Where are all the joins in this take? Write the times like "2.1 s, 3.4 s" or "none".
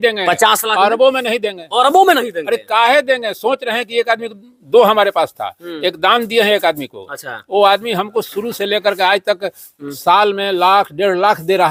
none